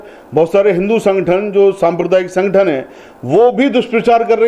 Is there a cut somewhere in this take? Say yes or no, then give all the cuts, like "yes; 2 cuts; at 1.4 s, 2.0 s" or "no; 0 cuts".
no; 0 cuts